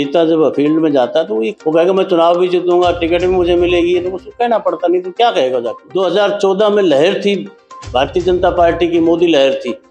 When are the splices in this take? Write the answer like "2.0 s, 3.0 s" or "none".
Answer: 1.5 s, 5.8 s